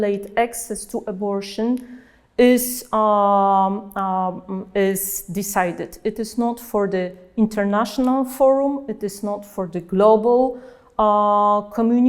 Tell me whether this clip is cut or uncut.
uncut